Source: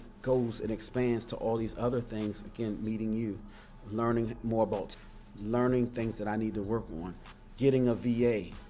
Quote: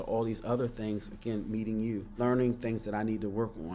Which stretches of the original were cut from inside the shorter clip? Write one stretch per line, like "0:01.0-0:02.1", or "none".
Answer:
0:03.4-0:05.4